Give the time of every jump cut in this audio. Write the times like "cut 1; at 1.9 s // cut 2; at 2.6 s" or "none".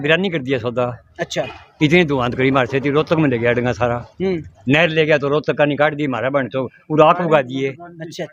none